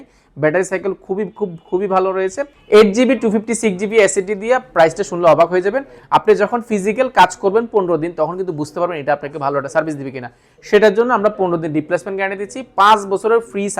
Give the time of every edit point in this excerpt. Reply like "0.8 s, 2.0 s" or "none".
2.5 s, 5.9 s